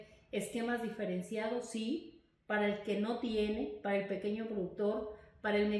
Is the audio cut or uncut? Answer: uncut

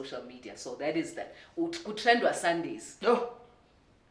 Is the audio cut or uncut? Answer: uncut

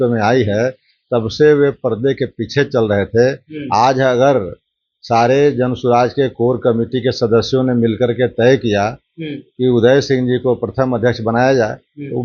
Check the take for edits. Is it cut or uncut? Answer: uncut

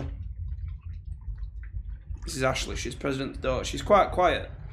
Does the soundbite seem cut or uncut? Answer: uncut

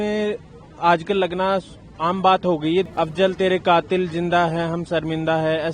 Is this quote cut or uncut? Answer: cut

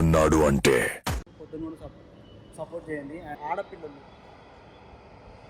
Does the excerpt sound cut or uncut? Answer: cut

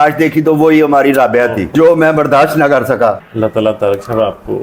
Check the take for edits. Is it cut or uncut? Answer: cut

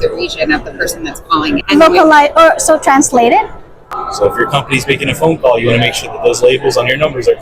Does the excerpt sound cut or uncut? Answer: cut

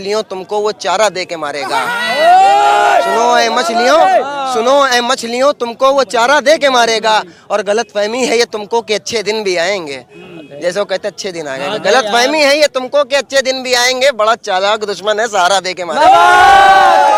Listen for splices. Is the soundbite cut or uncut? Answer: uncut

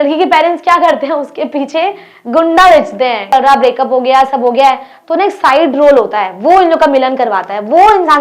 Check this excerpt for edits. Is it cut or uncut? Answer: cut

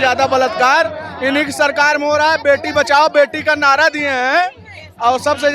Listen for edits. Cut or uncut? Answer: uncut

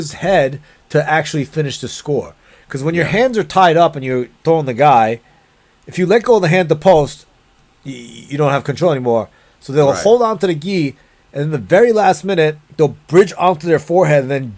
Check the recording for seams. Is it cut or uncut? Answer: uncut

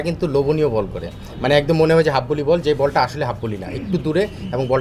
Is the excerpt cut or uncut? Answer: uncut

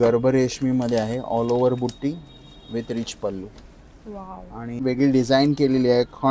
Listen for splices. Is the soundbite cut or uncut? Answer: cut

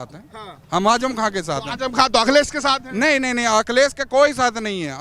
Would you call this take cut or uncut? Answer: uncut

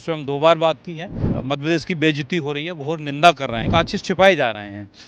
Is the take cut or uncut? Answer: cut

